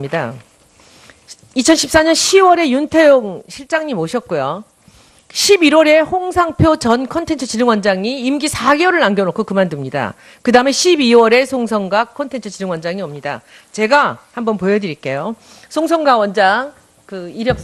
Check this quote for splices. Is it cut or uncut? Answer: uncut